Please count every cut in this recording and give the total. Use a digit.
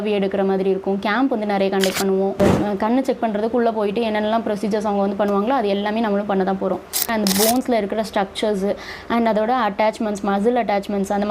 2